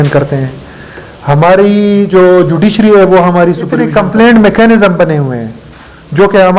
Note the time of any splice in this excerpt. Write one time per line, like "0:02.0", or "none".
0:03.9